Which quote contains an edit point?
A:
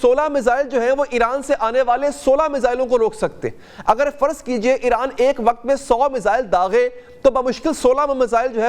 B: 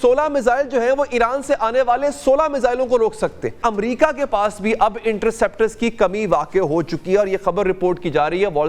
B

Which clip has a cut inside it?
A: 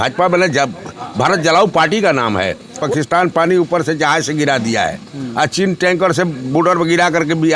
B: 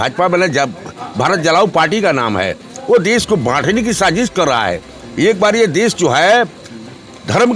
A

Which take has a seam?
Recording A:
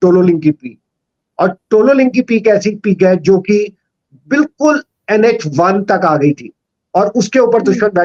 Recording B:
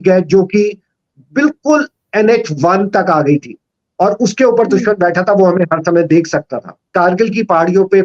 B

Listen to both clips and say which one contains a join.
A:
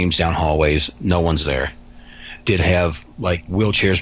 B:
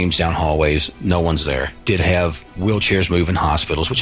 B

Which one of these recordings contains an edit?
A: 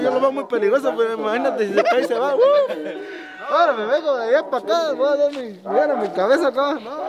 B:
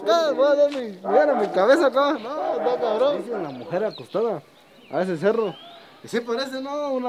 B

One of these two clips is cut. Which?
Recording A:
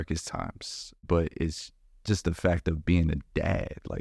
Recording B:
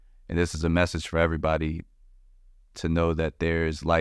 A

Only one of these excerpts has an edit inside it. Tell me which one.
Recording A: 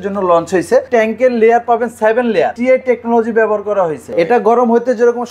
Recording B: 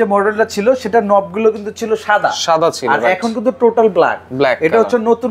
A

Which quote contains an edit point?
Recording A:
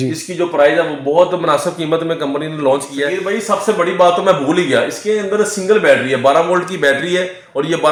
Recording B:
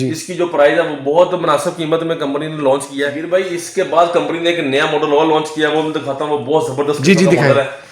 B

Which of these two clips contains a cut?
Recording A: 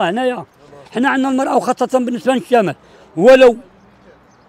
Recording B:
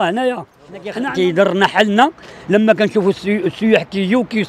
B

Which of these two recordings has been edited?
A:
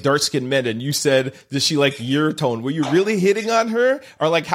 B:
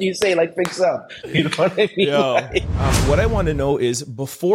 B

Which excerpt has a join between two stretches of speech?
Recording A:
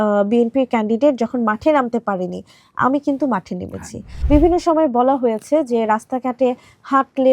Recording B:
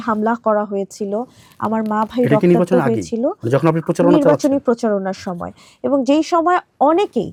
A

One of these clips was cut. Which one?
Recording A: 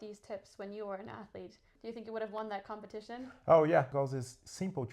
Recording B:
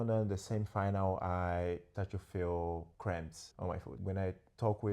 A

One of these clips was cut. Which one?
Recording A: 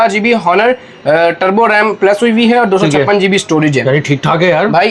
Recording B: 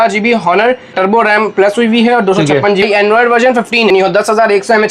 B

